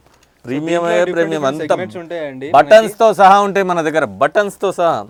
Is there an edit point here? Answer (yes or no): no